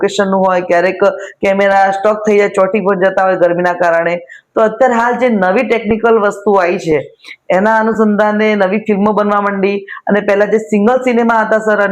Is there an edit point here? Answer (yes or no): no